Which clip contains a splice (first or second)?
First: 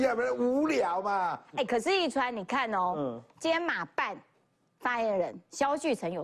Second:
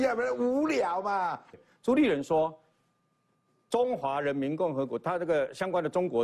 second